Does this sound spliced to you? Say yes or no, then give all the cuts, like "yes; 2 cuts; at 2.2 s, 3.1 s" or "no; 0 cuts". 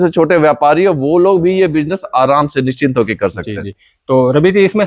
no; 0 cuts